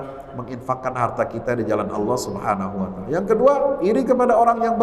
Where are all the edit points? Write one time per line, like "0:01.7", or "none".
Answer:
none